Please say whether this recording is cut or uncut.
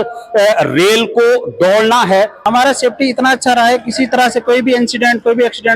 cut